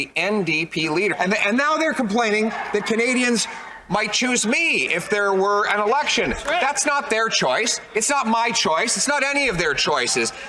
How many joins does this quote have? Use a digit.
1